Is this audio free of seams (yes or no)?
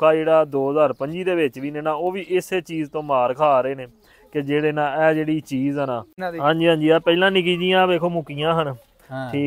no